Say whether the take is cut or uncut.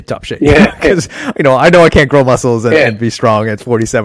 uncut